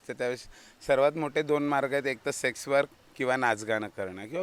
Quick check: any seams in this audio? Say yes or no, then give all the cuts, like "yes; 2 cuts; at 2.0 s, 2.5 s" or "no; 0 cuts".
no; 0 cuts